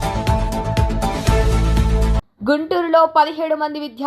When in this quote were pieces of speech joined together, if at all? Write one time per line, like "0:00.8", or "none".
0:02.3